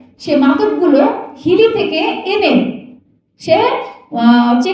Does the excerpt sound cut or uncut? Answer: uncut